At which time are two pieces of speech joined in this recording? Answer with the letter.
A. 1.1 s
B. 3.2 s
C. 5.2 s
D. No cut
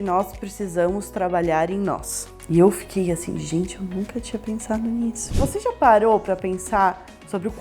C